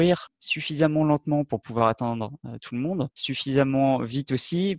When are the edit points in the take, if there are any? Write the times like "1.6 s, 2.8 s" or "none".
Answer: 3.2 s